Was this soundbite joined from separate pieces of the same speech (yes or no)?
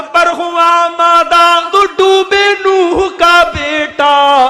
yes